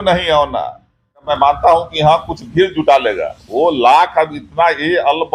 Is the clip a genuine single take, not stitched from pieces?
no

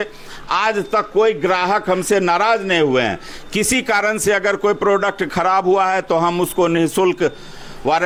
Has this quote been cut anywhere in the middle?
no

